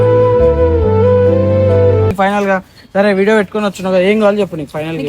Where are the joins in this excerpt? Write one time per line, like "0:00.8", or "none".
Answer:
0:02.1